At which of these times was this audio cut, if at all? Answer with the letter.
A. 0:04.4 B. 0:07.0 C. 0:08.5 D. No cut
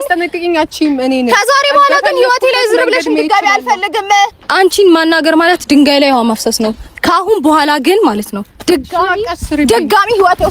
A